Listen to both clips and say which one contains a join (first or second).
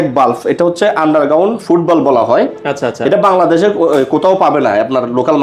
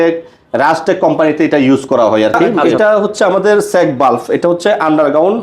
second